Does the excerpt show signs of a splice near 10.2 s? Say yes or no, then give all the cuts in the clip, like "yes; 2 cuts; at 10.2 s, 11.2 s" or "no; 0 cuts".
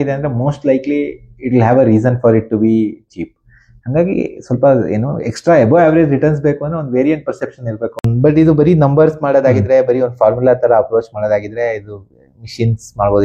no; 1 cut; at 8.1 s